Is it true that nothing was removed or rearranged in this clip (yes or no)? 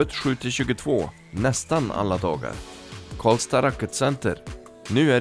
yes